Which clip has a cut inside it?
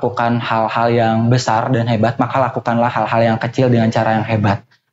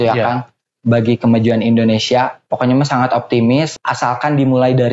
second; 1 cut; at 3.7 s

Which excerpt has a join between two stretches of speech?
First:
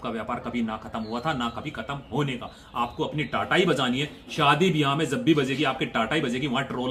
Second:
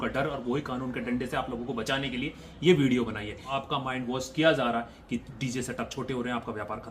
second; 1 cut; at 3.5 s

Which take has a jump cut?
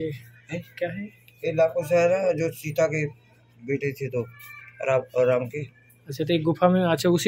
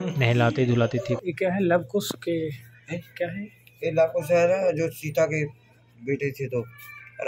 second; 1 cut; at 1.1 s

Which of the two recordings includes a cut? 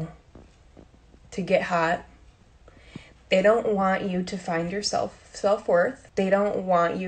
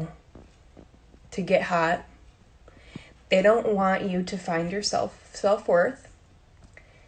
first; 1 cut; at 6.0 s

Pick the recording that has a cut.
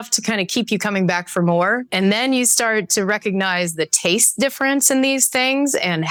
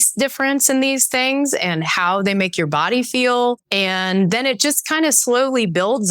second; 1 cut; at 3.6 s

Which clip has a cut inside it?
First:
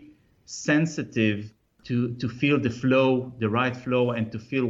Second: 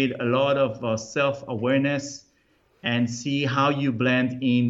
first; 1 cut; at 1.7 s

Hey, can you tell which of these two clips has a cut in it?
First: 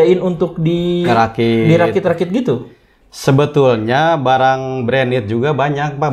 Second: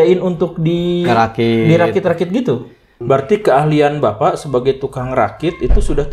second; 1 cut; at 2.9 s

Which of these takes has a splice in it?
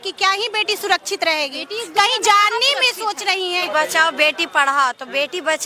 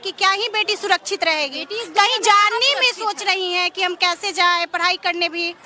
first; 1 cut; at 3.6 s

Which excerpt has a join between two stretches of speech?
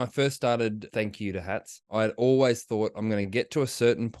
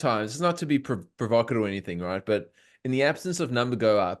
first; 2 cuts; at 0.8 s, 1.9 s

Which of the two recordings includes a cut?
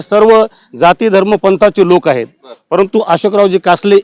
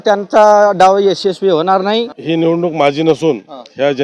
second; 1 cut; at 2.1 s

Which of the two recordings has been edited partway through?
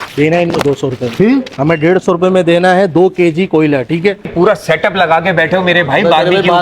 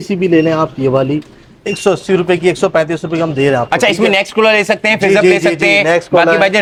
first; 1 cut; at 4.3 s

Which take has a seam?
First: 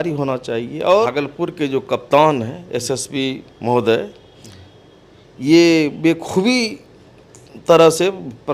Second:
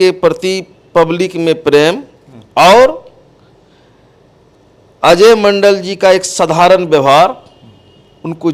first; 1 cut; at 1.1 s

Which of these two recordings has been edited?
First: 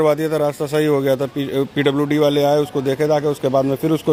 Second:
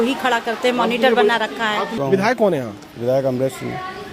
second; 1 cut; at 1.9 s

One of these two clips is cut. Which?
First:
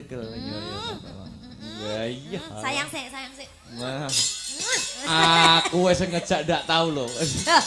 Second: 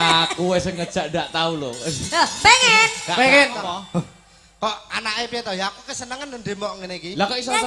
second; 1 cut; at 3.6 s

